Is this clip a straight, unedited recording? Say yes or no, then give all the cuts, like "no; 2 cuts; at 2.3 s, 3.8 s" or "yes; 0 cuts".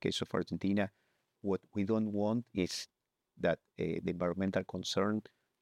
no; 1 cut; at 1.4 s